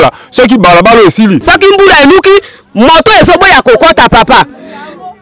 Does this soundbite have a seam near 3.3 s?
no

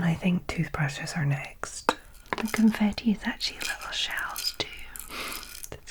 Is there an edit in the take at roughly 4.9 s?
no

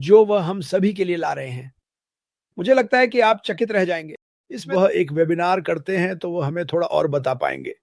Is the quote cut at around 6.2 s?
no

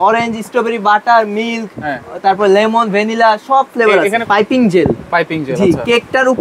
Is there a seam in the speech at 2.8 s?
no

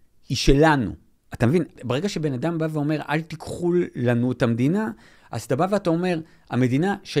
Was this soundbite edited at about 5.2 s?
no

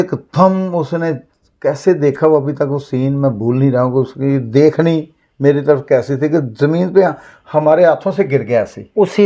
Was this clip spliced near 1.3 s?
no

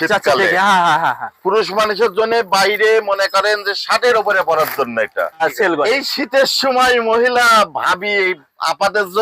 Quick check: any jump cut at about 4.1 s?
no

